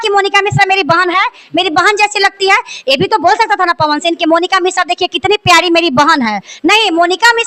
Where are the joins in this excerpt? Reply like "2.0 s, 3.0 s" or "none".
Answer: none